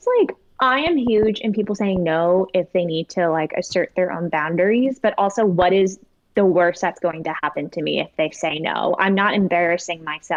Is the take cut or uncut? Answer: uncut